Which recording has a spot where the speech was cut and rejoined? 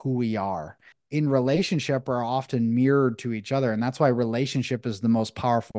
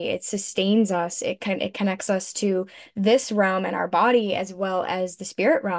first; 1 cut; at 0.9 s

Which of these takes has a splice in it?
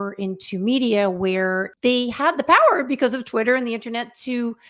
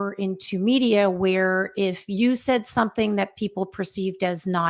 first; 1 cut; at 1.7 s

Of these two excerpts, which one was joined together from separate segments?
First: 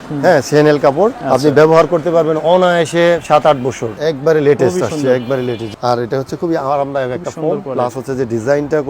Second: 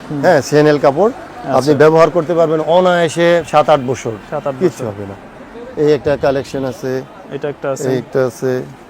first; 3 cuts; at 1.2 s, 3.9 s, 5.7 s

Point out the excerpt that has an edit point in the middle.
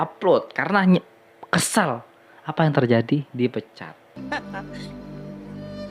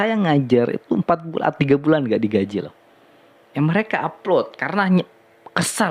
first; 1 cut; at 4.2 s

